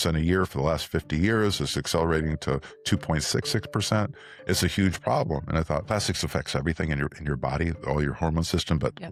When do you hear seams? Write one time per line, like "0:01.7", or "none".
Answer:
none